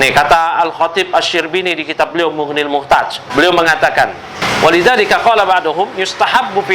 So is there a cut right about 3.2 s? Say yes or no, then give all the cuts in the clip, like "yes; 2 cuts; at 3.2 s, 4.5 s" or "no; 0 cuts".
yes; 2 cuts; at 3.2 s, 4.4 s